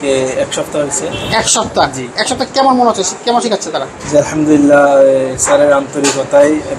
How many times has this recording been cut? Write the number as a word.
zero